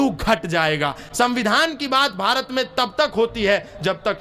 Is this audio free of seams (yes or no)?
yes